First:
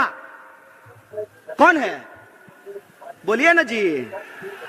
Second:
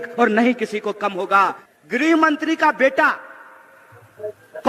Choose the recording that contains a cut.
second; 1 cut; at 1.6 s

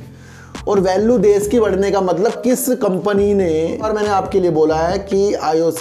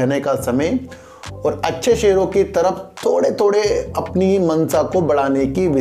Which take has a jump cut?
first; 1 cut; at 3.9 s

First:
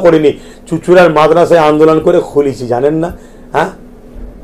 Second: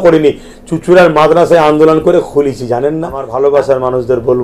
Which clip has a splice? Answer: second; 1 cut; at 3.2 s

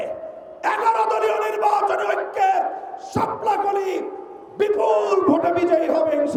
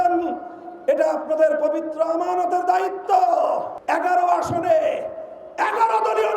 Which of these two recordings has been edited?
second; 1 cut; at 3.7 s

